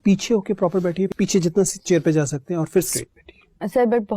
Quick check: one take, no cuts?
no; 2 cuts; at 1.1 s, 2.9 s

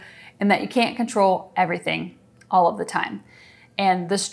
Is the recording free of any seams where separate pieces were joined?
yes; 0 cuts

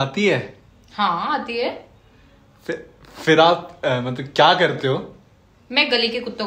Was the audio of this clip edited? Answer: no; 0 cuts

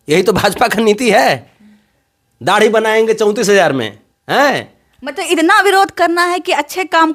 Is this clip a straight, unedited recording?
yes; 0 cuts

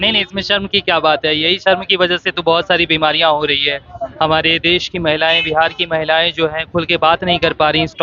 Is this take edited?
no; 0 cuts

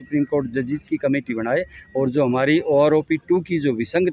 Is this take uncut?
yes; 0 cuts

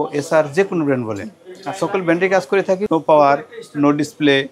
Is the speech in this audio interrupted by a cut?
yes; 1 cut; at 2.8 s

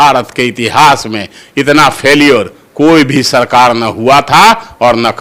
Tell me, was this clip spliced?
no; 0 cuts

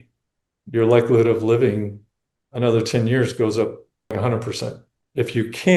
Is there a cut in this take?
yes; 1 cut; at 4.5 s

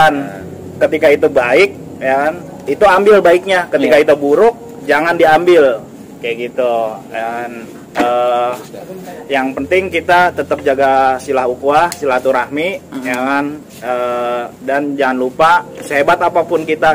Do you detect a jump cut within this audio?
no; 0 cuts

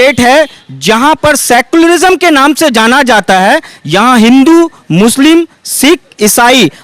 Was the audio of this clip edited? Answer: no; 0 cuts

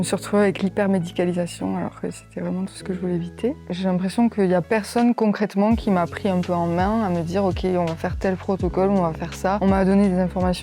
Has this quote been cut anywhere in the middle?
yes; 2 cuts; at 3.7 s, 9.6 s

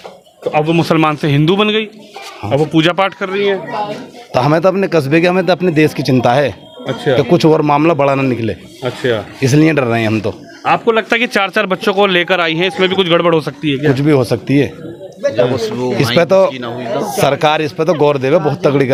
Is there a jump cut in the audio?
no; 0 cuts

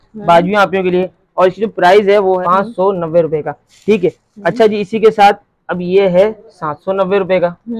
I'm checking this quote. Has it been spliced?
no; 0 cuts

